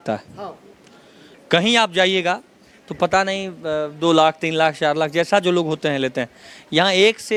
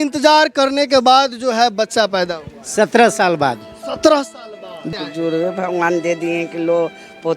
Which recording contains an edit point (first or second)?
second